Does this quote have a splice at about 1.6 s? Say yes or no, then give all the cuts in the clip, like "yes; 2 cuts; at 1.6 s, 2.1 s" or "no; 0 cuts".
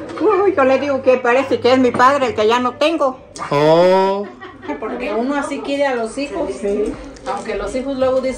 no; 1 cut; at 4.7 s